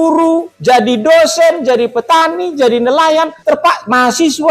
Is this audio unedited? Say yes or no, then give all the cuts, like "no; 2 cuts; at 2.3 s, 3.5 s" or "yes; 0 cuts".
no; 1 cut; at 3.3 s